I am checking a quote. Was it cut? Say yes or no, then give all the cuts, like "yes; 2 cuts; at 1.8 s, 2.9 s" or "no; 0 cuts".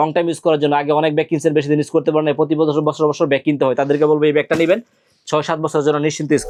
no; 0 cuts